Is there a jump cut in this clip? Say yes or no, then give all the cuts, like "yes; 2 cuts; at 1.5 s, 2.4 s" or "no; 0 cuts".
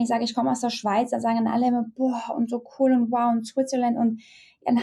no; 0 cuts